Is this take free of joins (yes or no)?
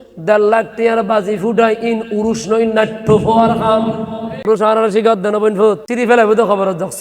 no